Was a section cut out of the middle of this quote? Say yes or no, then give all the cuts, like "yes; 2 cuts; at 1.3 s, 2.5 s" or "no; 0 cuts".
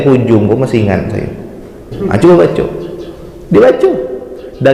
yes; 1 cut; at 1.9 s